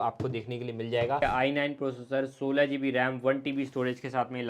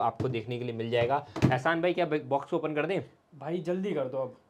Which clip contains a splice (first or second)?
first